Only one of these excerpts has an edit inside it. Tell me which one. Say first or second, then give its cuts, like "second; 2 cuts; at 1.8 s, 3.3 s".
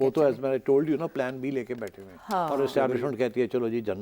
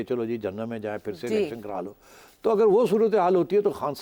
first; 1 cut; at 2.5 s